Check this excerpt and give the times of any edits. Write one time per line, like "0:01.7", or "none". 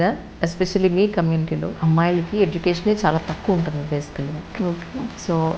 0:01.7